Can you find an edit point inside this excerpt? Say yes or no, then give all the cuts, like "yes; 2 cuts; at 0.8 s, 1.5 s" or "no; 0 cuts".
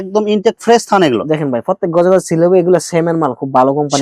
no; 0 cuts